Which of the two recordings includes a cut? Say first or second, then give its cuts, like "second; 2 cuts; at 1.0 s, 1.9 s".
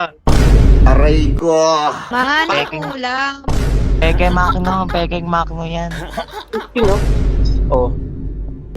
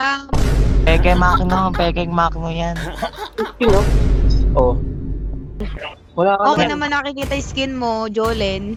first; 1 cut; at 2.0 s